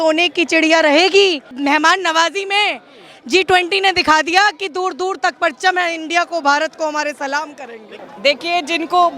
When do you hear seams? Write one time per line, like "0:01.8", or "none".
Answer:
0:01.5
0:08.0